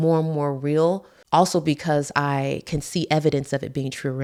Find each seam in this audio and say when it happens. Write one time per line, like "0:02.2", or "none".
none